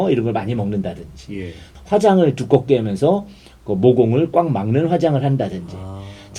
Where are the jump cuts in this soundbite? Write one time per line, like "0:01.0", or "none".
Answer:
0:01.6